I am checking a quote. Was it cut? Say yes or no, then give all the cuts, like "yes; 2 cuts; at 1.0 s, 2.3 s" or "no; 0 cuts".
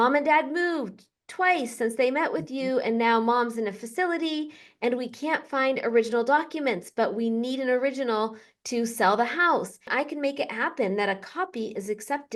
yes; 1 cut; at 9.9 s